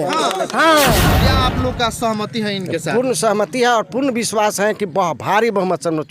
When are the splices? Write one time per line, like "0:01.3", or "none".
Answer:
0:01.2